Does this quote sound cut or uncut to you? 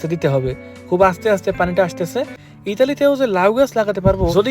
cut